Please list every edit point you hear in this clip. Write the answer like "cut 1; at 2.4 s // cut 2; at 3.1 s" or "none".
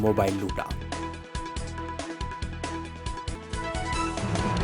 none